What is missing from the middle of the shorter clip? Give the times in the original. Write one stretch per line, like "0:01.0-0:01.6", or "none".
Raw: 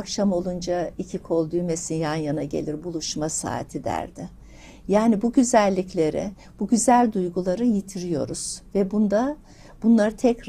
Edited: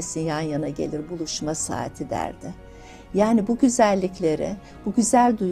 none

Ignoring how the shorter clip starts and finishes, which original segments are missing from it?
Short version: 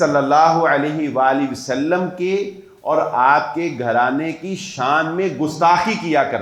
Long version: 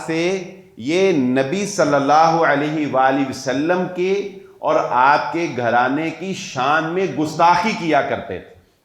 none

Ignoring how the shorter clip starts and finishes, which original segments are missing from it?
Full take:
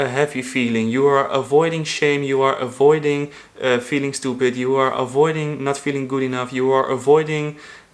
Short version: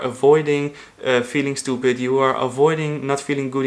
none

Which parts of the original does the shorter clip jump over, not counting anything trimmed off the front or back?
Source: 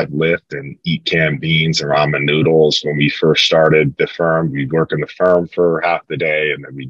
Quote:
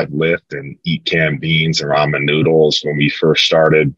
none

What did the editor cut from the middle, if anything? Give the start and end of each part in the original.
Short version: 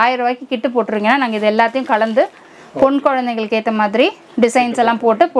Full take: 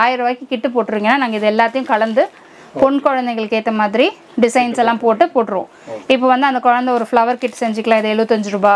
none

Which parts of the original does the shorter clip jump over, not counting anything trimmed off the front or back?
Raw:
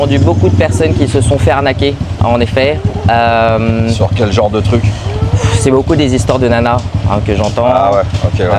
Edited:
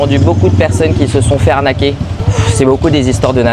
0:02.1-0:05.1

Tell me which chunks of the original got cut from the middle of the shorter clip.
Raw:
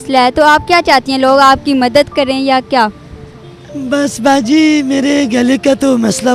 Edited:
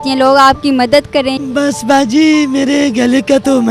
0:02.4-0:03.7

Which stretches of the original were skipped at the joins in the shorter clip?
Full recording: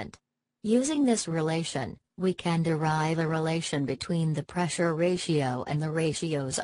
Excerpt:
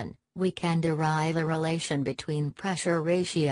0:04.4-0:04.5

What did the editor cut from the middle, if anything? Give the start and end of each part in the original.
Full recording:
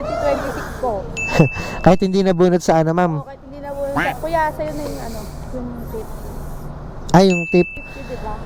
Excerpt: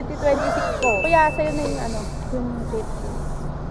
0:01.0-0:04.2

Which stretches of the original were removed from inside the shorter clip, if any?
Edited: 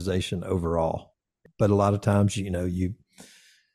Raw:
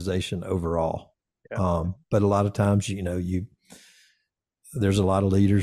0:01.4-0:02.0

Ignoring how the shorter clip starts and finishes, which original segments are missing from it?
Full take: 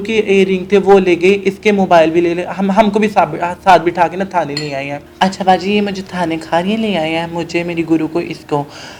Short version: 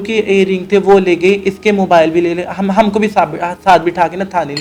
none

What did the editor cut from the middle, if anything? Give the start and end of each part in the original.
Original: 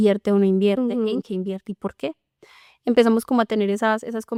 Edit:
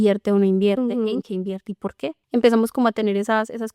0:02.2-0:02.7

